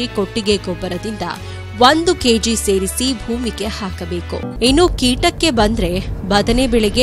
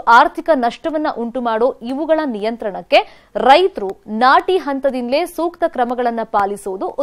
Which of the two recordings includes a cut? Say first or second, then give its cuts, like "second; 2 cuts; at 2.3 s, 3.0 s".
first; 1 cut; at 4.5 s